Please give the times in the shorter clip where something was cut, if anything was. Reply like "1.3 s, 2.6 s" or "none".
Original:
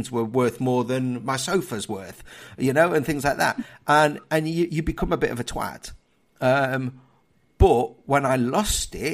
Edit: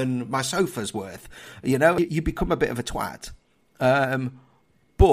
2.0 s